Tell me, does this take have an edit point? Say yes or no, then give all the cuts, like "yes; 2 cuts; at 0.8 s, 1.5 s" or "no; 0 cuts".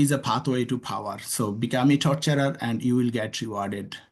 no; 0 cuts